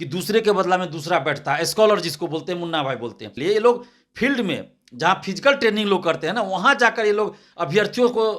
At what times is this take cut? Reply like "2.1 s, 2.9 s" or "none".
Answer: 3.3 s